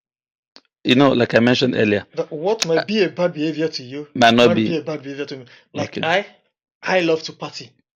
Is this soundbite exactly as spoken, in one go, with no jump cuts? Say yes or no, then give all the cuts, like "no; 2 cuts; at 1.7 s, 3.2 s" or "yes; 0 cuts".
yes; 0 cuts